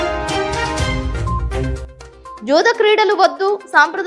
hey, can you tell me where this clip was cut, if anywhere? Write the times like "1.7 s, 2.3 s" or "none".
none